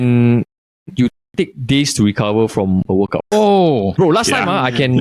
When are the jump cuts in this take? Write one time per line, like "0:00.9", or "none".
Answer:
0:03.3